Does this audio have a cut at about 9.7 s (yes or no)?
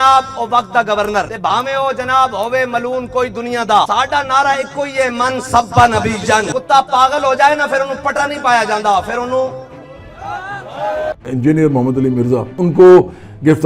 no